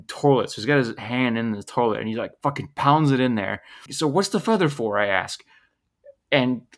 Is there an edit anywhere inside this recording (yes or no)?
yes